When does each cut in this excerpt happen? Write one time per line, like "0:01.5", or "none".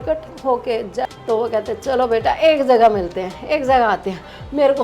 0:01.1